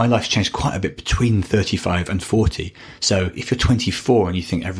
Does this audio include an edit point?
yes; 1 cut; at 3.4 s

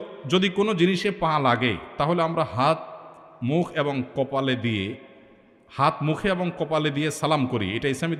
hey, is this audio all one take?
yes; 0 cuts

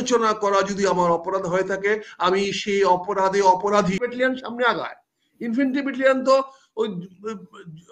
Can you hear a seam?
yes; 1 cut; at 4.1 s

